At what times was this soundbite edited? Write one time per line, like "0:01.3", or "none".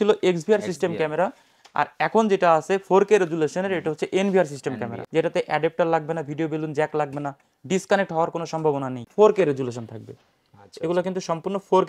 0:04.9
0:09.0